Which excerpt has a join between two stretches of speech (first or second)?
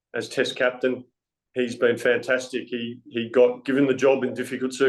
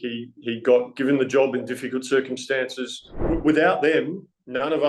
second